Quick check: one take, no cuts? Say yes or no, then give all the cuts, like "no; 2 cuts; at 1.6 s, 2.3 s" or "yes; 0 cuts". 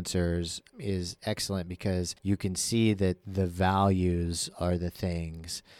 no; 2 cuts; at 1.0 s, 2.1 s